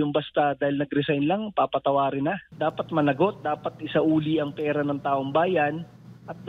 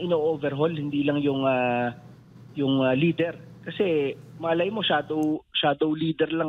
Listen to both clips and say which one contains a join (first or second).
first